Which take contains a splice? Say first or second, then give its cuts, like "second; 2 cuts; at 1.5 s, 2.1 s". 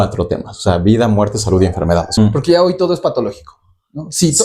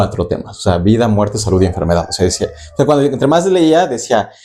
first; 1 cut; at 2.1 s